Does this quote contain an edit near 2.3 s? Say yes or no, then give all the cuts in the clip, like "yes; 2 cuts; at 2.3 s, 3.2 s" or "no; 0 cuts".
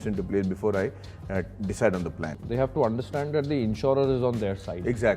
yes; 1 cut; at 2.3 s